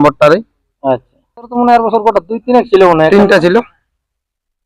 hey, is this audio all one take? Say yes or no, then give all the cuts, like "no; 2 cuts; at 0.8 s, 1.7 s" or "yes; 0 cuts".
no; 1 cut; at 1.5 s